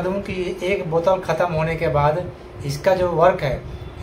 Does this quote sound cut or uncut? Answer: uncut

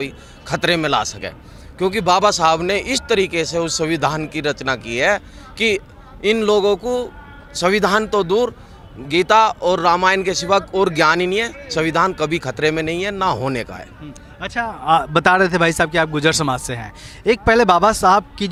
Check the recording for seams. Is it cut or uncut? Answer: uncut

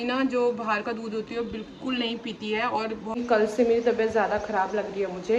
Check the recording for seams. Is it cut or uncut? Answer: cut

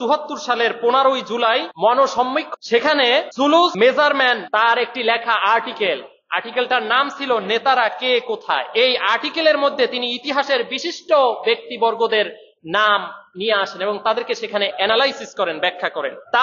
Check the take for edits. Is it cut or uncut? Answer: uncut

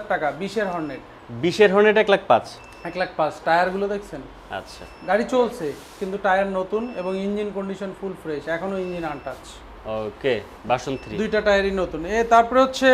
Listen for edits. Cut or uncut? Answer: uncut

